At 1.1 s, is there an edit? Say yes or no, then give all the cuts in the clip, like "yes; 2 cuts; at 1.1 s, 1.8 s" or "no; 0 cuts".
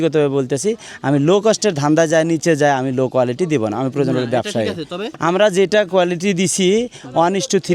no; 1 cut; at 5.1 s